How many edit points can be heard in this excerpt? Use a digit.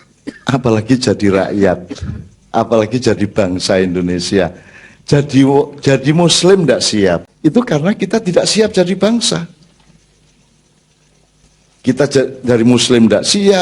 1